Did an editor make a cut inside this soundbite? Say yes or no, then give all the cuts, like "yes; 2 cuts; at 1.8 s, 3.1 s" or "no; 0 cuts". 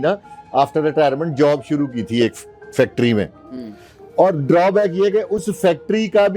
no; 0 cuts